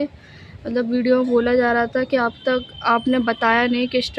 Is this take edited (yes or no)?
no